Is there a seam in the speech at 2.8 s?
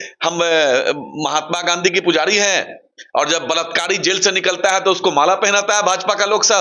no; 0 cuts

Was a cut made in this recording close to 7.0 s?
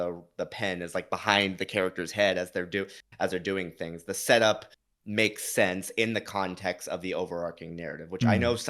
no; 0 cuts

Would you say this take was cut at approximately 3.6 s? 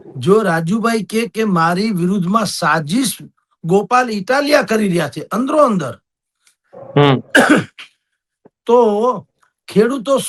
no; 0 cuts

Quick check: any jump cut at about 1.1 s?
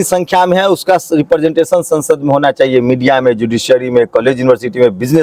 no; 0 cuts

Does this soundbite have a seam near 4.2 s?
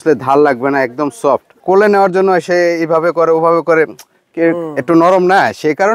no; 1 cut; at 1.6 s

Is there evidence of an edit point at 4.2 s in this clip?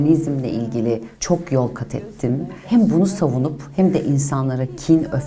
no; 2 cuts; at 1.1 s, 2.5 s

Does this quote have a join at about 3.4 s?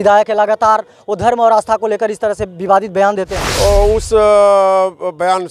yes; 1 cut; at 3.4 s

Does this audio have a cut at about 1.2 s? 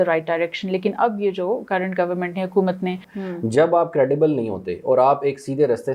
no; 1 cut; at 3.1 s

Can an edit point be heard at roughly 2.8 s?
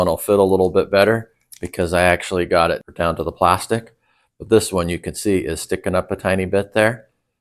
yes; 1 cut; at 2.8 s

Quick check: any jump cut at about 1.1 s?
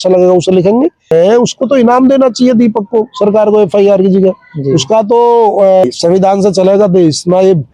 yes; 2 cuts; at 1.1 s, 5.8 s

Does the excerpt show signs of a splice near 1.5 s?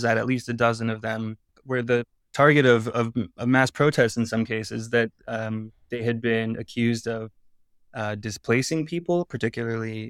yes; 1 cut; at 1.5 s

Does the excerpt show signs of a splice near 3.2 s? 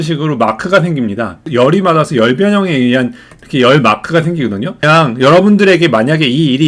no; 2 cuts; at 1.5 s, 4.8 s

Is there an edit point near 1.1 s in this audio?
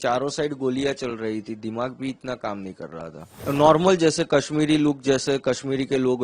no; 1 cut; at 3.4 s

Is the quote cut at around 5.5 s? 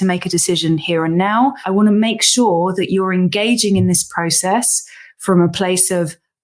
no; 1 cut; at 1.6 s

